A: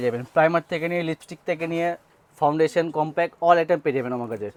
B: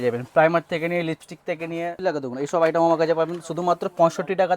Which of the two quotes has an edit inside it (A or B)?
B